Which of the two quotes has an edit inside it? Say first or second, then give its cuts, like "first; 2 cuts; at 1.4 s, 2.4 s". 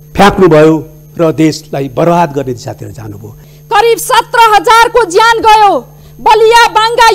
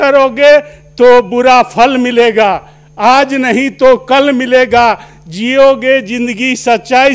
first; 1 cut; at 3.4 s